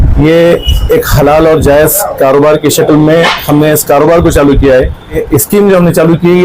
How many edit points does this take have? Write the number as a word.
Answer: one